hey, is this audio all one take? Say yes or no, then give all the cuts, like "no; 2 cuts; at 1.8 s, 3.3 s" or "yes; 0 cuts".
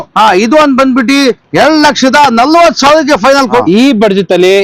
no; 1 cut; at 3.6 s